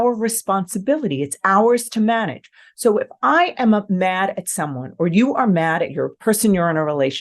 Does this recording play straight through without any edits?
no; 1 cut; at 6.1 s

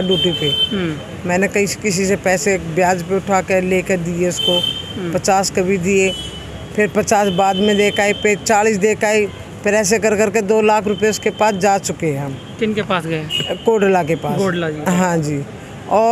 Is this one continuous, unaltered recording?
yes; 0 cuts

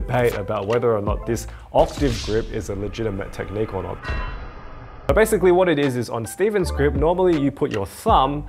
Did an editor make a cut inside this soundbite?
no; 0 cuts

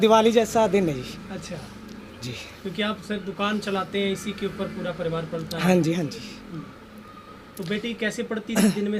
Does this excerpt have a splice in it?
no; 0 cuts

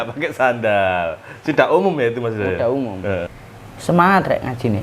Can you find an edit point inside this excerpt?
yes; 1 cut; at 3.3 s

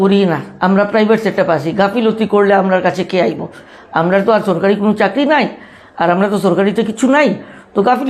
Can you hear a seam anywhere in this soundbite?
no; 0 cuts

